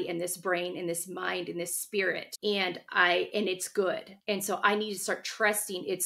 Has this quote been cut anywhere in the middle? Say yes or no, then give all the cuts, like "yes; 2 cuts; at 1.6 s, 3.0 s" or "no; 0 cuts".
no; 0 cuts